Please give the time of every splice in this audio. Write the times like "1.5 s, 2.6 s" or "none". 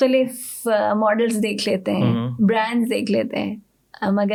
none